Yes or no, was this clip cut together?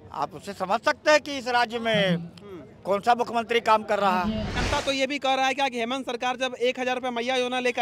yes